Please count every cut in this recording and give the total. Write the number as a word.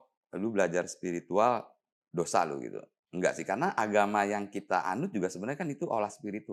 zero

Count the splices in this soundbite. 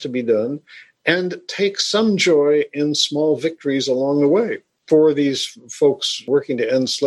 two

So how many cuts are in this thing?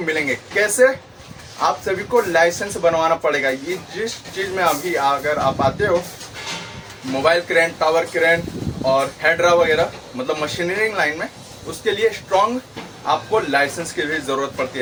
zero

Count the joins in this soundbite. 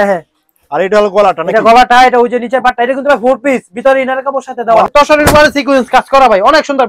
one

